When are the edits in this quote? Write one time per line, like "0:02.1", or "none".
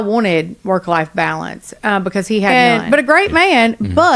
0:02.5